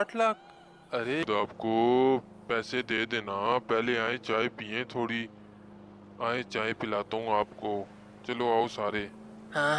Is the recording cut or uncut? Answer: cut